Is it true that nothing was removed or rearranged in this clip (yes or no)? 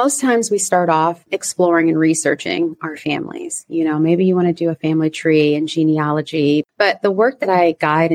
no